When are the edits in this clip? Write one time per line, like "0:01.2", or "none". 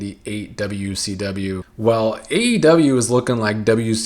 0:01.7